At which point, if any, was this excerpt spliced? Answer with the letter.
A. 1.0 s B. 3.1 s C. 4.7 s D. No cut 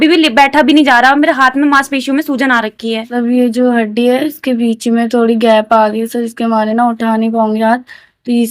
B